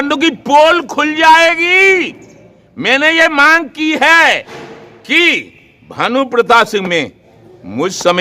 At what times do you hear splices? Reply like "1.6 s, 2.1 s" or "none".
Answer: none

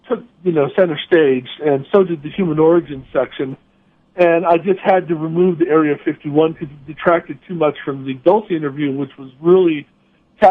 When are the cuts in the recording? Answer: 3.1 s

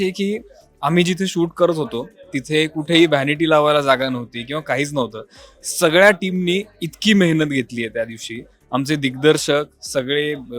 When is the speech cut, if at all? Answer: none

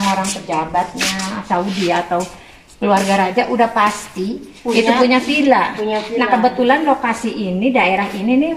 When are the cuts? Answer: none

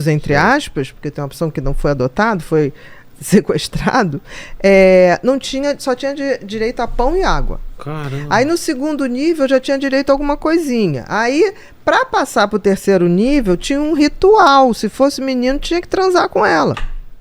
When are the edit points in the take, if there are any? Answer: none

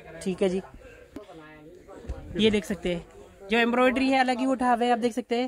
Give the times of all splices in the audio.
1.2 s

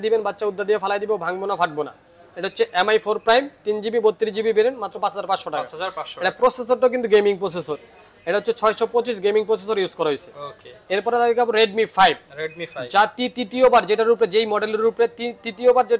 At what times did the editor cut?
none

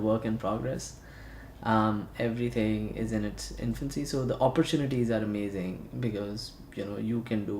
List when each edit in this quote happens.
4.4 s

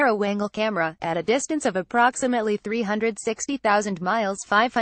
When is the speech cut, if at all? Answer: none

